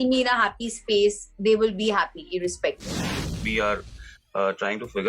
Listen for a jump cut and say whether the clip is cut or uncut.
cut